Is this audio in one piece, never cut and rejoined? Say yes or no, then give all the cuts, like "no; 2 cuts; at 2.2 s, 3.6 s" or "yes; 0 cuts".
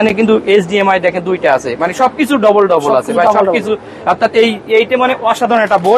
yes; 0 cuts